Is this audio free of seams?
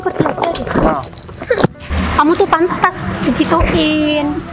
no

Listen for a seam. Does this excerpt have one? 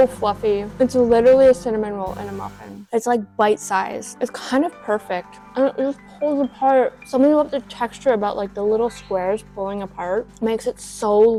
no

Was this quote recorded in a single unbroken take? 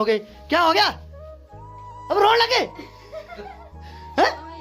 yes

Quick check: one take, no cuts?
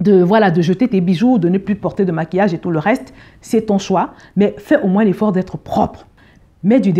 yes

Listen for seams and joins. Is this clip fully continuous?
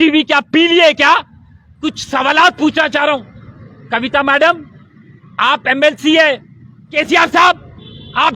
no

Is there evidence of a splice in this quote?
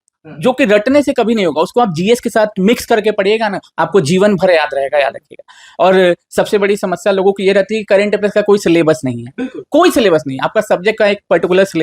no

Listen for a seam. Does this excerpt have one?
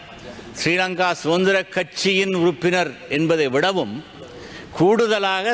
no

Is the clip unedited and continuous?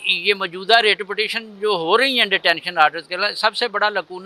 yes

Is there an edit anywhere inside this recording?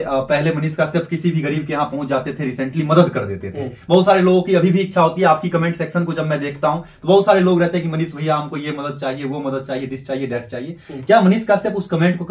no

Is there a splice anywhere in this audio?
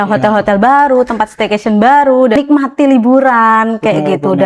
yes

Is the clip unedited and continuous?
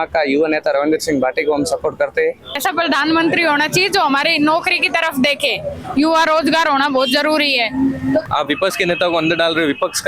no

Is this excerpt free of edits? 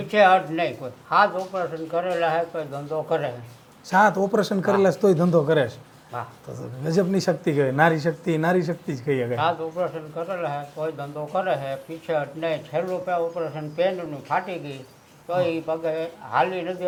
yes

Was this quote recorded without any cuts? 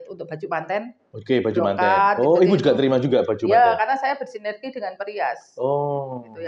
yes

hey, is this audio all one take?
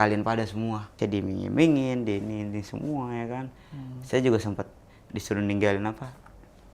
no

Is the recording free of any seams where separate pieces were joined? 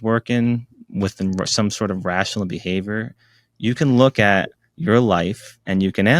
yes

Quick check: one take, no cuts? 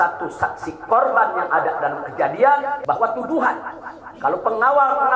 no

